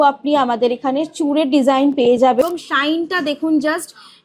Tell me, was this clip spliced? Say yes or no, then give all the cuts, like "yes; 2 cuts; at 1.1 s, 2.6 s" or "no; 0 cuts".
yes; 1 cut; at 2.4 s